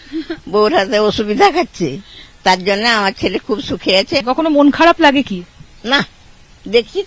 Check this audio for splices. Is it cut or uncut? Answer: cut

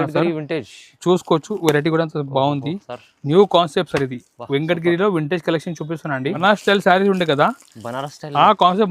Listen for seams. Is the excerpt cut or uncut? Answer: cut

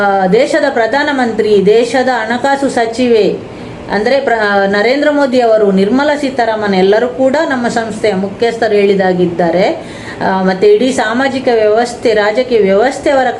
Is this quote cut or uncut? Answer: uncut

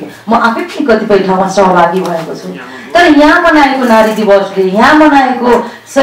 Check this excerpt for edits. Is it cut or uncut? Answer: uncut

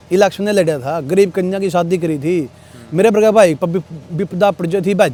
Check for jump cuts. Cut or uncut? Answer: uncut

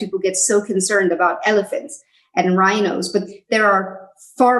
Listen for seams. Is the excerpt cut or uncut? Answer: uncut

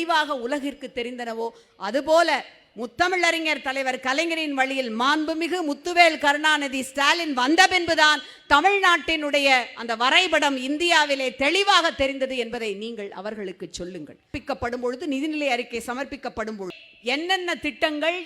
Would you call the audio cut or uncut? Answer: cut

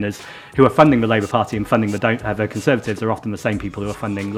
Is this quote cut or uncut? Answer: uncut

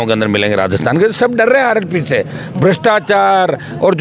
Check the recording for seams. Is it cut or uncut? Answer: uncut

